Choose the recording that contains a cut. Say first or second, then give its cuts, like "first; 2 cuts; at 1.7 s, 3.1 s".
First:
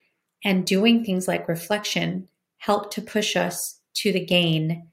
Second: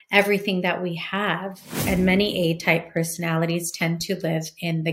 second; 1 cut; at 1.8 s